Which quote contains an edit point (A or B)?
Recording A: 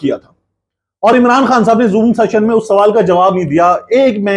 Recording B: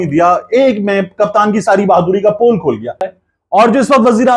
B